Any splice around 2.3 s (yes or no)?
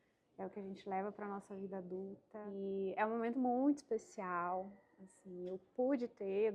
yes